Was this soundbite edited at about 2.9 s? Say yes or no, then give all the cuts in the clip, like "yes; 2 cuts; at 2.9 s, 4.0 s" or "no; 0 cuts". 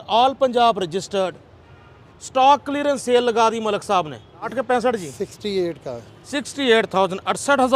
no; 1 cut; at 4.5 s